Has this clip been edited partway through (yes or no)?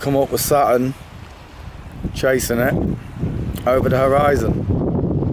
no